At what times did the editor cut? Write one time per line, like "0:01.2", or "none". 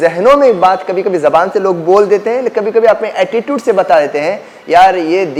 none